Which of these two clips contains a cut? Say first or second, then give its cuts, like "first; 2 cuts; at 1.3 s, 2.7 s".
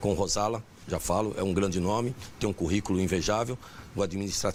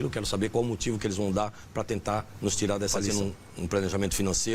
second; 1 cut; at 3.1 s